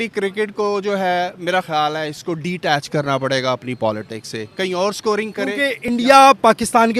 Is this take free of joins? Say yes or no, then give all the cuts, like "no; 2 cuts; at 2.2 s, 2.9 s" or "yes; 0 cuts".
no; 1 cut; at 5.9 s